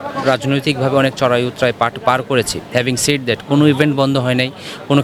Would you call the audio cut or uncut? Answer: uncut